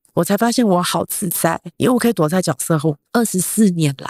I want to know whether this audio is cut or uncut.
cut